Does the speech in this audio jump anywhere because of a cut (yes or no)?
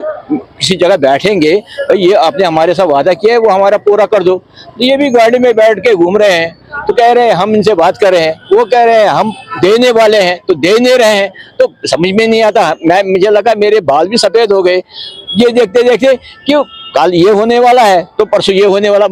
no